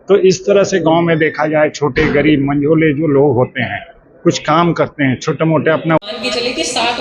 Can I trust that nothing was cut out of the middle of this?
no; 1 cut; at 6.0 s

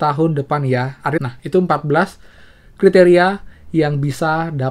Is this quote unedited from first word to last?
no; 1 cut; at 1.2 s

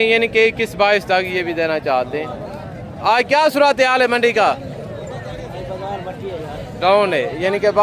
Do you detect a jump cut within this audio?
no; 0 cuts

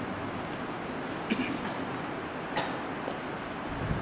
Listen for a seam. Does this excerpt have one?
yes; 1 cut; at 2.1 s

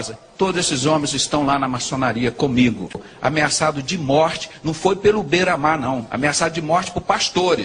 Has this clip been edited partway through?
yes; 1 cut; at 3.0 s

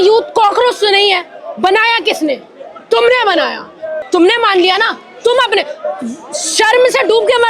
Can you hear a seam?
yes; 1 cut; at 3.9 s

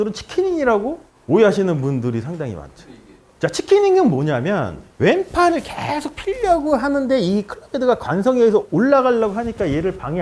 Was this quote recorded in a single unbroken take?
yes; 0 cuts

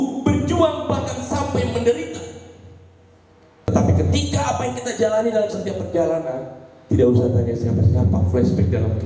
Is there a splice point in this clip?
yes; 1 cut; at 3.7 s

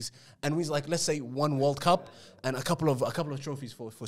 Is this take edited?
no; 0 cuts

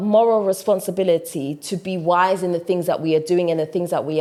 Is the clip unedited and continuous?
yes; 0 cuts

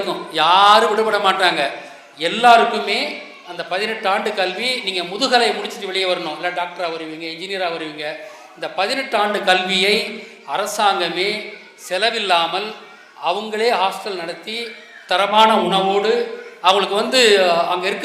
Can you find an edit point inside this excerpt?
no; 0 cuts

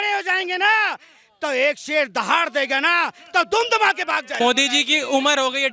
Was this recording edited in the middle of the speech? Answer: yes; 1 cut; at 4.4 s

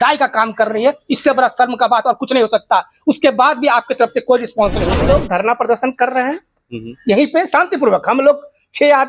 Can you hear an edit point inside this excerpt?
yes; 1 cut; at 4.9 s

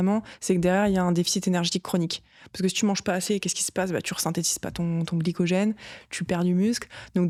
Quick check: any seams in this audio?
no; 0 cuts

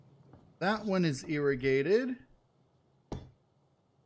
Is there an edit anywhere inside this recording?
no; 0 cuts

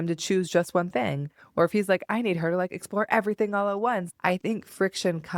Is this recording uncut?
no; 1 cut; at 4.1 s

